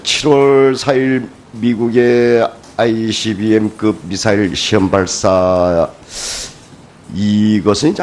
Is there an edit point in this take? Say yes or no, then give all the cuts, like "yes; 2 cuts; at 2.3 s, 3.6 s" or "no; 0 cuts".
yes; 1 cut; at 4.7 s